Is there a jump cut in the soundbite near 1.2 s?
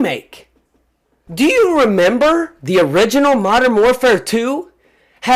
yes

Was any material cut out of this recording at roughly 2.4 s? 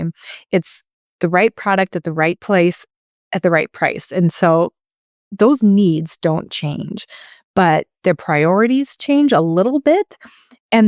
yes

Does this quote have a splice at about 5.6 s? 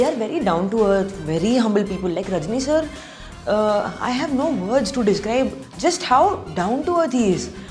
yes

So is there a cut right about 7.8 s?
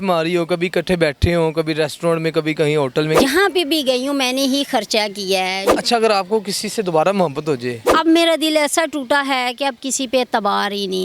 yes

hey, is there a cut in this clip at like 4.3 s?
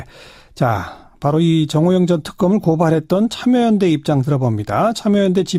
no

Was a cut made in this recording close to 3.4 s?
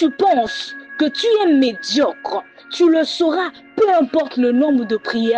no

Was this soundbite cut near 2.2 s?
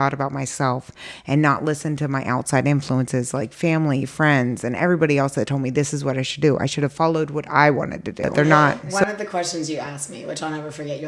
no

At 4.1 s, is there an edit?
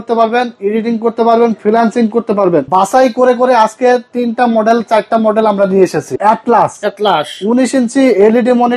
no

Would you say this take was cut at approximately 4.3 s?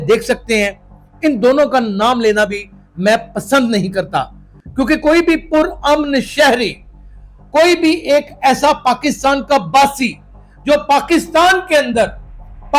no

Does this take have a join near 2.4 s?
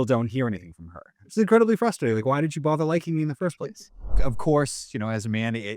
no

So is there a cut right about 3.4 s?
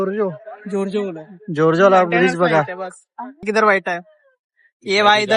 yes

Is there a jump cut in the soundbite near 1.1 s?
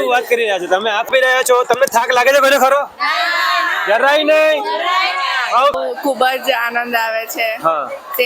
yes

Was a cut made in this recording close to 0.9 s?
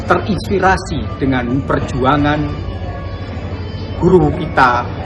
no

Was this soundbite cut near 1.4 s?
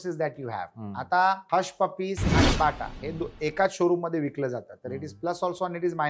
yes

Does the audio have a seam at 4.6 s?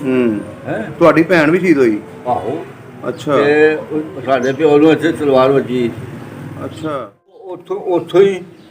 no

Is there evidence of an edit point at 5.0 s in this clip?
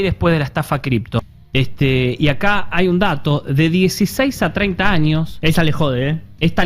no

